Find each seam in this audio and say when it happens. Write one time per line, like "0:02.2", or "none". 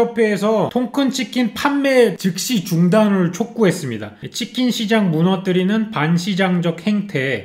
none